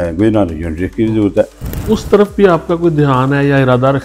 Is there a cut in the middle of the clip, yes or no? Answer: yes